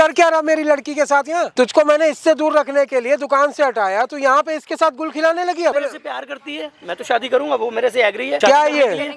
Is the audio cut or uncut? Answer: cut